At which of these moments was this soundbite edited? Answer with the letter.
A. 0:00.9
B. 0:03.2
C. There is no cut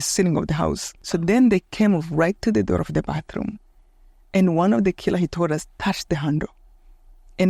A